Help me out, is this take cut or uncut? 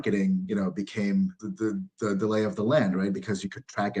cut